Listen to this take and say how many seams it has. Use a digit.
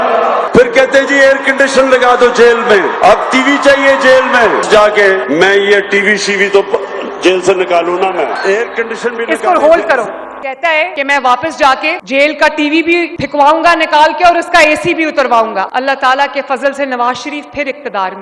4